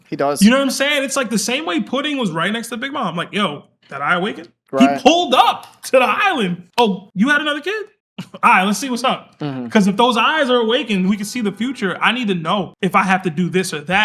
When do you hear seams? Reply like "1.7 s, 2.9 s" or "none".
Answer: none